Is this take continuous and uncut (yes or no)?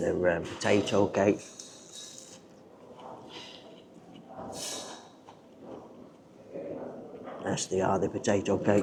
yes